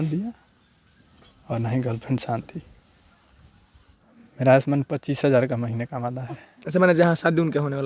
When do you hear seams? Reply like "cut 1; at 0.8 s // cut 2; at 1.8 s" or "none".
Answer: cut 1; at 4.0 s